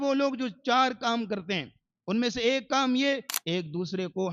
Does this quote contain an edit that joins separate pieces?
yes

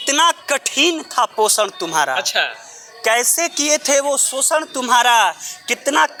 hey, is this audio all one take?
yes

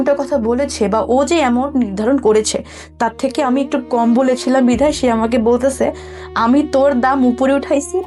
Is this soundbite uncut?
yes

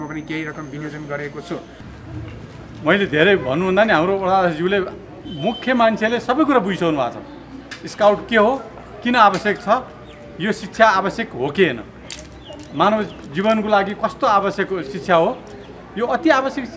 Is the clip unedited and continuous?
no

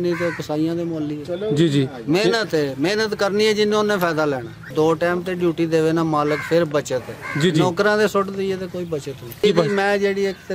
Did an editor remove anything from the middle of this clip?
yes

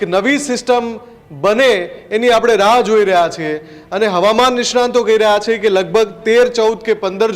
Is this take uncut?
yes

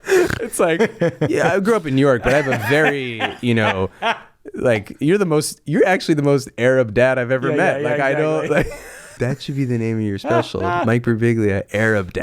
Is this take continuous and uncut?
no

